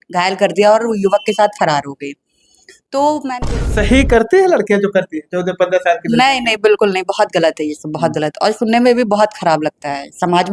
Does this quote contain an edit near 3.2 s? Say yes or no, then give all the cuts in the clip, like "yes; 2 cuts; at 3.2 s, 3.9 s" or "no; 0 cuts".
yes; 1 cut; at 3.2 s